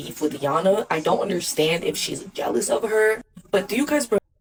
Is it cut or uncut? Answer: uncut